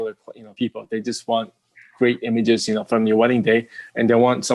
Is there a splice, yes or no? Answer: no